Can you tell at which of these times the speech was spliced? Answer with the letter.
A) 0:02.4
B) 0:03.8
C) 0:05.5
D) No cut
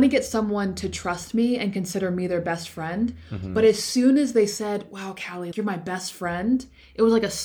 C